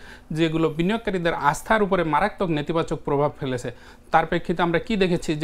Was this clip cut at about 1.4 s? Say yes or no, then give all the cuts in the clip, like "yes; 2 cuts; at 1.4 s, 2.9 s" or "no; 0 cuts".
yes; 1 cut; at 1.4 s